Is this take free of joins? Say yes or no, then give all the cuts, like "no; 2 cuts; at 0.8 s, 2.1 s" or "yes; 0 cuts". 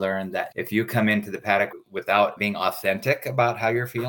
yes; 0 cuts